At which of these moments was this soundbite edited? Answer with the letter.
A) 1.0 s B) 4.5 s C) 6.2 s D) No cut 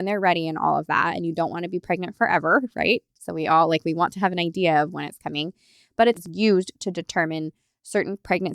C